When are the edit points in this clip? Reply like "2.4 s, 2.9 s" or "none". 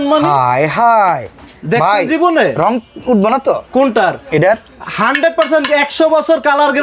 none